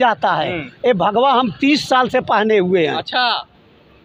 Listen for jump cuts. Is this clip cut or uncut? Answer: uncut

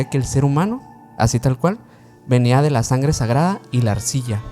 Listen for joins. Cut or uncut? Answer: uncut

